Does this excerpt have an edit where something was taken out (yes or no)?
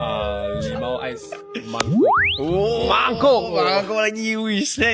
no